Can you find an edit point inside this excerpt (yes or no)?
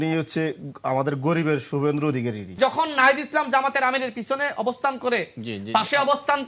yes